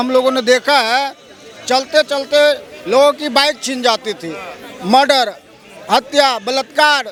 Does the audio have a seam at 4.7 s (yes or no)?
no